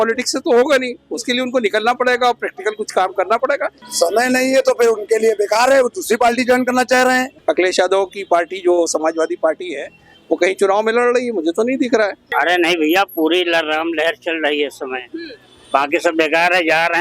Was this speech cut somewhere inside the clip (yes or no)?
yes